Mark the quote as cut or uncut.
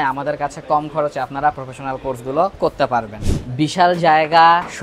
uncut